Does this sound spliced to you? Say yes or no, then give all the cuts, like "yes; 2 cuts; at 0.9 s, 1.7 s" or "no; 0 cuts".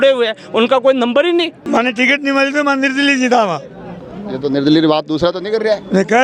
yes; 1 cut; at 1.6 s